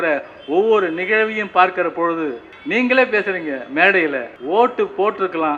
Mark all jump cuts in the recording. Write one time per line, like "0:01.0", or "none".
0:02.5
0:04.3